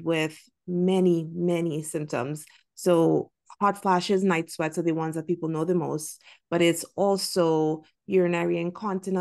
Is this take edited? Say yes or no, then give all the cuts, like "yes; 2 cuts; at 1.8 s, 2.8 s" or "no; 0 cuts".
no; 0 cuts